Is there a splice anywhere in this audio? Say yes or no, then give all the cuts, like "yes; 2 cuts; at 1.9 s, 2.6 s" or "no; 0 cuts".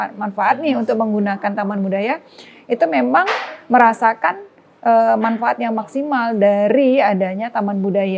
no; 0 cuts